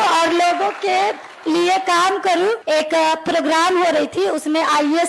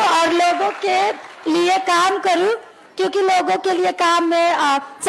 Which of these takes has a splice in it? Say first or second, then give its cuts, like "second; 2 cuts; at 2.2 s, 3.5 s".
first; 1 cut; at 2.6 s